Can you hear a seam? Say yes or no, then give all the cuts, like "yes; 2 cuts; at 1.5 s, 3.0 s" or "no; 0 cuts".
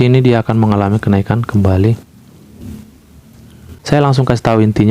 yes; 1 cut; at 3.7 s